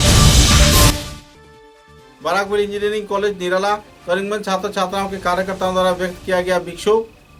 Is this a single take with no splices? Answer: yes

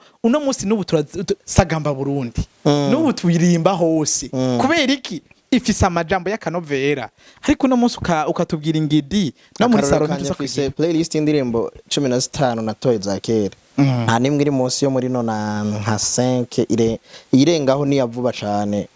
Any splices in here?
no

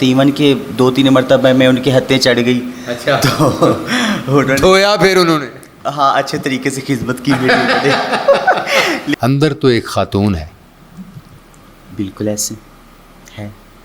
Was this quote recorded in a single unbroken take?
no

